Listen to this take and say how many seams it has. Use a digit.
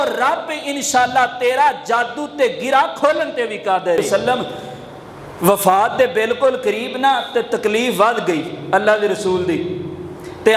1